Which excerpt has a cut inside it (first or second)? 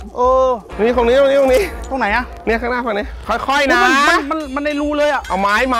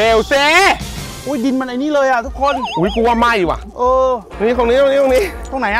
second